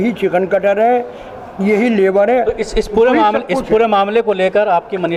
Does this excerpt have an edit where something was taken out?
no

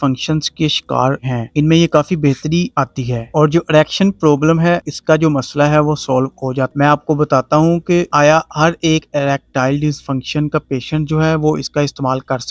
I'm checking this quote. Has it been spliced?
yes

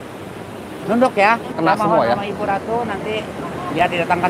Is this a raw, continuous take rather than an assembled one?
no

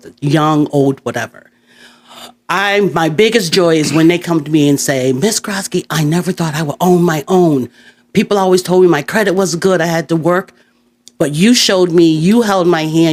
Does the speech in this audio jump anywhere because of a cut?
no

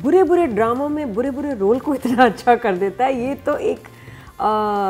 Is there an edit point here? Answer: no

